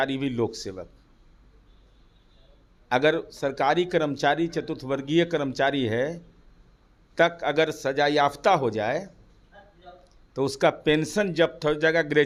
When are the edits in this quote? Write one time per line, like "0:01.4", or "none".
none